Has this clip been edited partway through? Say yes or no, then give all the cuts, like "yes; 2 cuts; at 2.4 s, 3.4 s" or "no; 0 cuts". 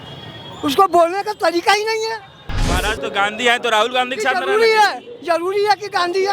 yes; 1 cut; at 2.5 s